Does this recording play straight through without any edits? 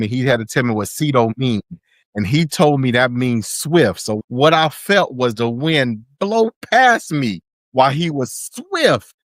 yes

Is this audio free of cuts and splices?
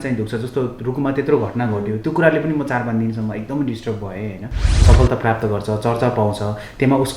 no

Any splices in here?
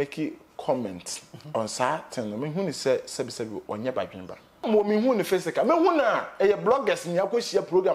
yes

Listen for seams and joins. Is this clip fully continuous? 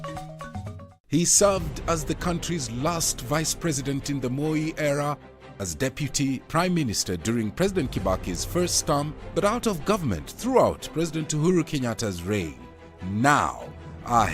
no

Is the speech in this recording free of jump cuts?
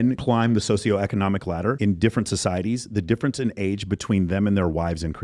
yes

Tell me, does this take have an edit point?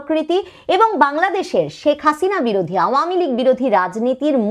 no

